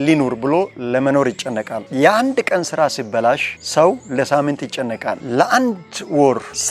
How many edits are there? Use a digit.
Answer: 1